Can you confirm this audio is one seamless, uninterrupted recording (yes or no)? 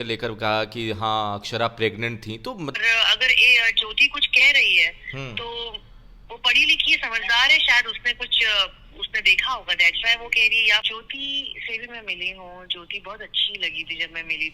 no